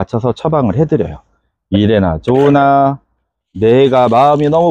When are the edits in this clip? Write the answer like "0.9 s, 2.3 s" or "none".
none